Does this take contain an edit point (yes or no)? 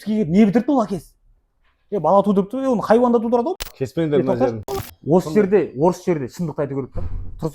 yes